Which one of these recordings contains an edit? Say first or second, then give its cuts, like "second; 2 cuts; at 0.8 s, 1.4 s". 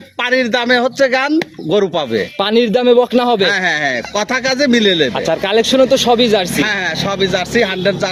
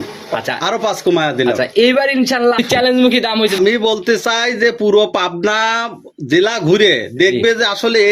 second; 1 cut; at 3.6 s